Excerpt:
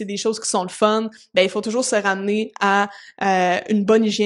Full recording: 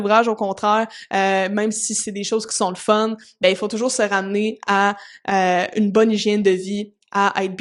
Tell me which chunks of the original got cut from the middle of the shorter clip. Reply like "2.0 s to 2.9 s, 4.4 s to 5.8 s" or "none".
none